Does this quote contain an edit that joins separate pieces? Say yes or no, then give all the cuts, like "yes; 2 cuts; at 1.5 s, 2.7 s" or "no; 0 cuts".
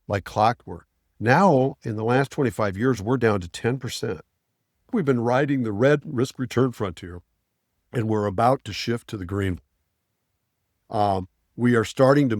yes; 1 cut; at 4.9 s